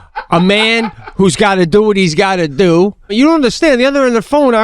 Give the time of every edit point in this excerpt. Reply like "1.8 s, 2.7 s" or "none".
3.1 s

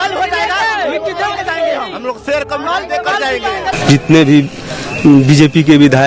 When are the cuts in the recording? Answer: 3.7 s

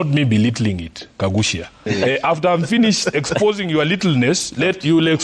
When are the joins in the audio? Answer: 1.9 s

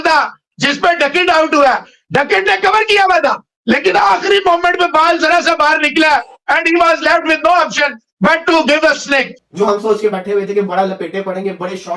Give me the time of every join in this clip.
9.4 s

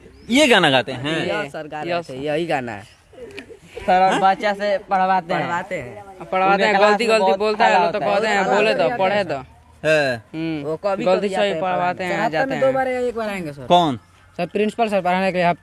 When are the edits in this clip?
none

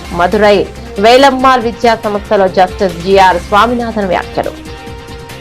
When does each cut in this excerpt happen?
4.5 s

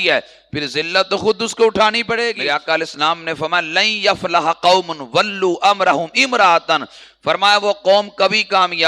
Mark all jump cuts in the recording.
2.3 s

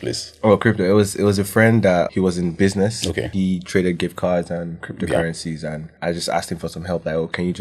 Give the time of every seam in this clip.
2.1 s, 3.3 s, 5.9 s

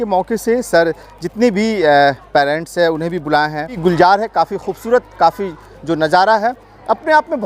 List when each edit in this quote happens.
3.7 s

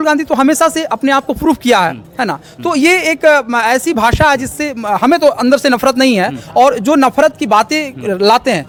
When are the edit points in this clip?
none

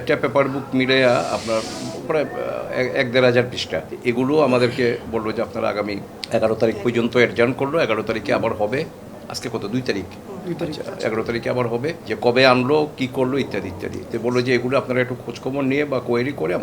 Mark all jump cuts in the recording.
12.1 s

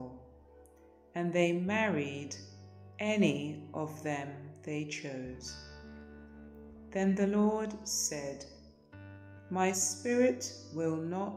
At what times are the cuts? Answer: 5.4 s, 6.9 s

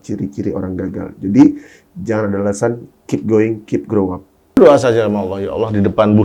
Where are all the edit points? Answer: 4.6 s

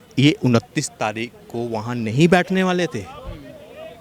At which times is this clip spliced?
none

